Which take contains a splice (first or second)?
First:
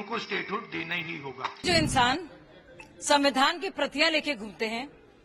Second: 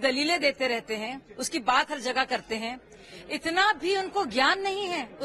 first